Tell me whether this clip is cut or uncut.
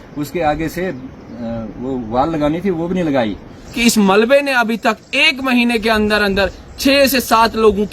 cut